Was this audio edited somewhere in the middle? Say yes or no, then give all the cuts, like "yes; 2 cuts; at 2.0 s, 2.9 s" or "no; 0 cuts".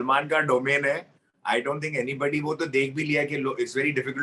no; 0 cuts